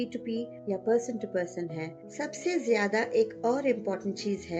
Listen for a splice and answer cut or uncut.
uncut